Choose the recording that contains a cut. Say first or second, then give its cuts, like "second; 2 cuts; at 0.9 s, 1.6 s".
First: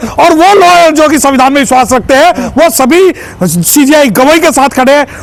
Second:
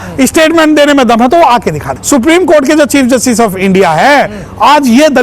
second; 1 cut; at 2.0 s